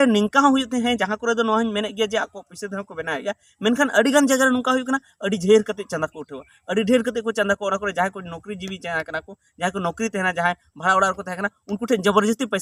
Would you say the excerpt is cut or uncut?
uncut